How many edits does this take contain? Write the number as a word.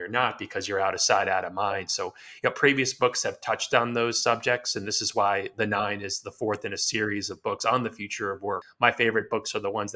one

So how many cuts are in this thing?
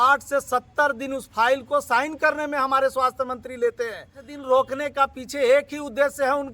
one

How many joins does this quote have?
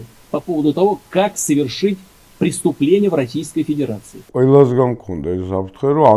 one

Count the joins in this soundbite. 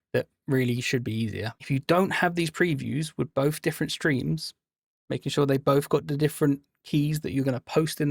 one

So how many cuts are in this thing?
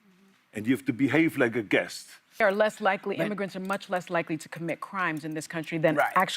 one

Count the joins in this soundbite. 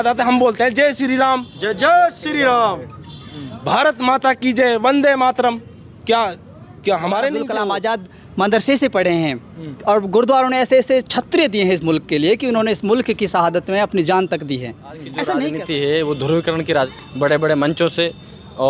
three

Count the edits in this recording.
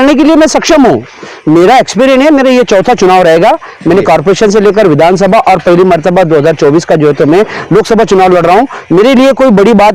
zero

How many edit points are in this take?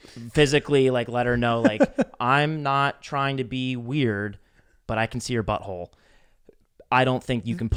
zero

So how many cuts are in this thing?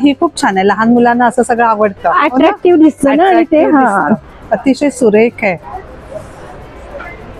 zero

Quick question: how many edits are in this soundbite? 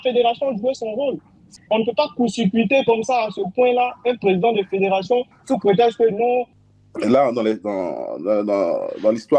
two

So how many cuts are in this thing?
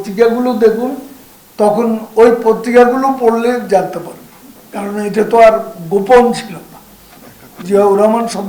zero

